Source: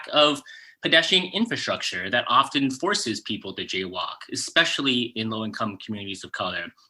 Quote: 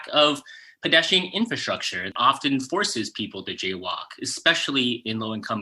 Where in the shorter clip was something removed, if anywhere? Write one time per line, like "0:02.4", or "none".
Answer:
0:02.1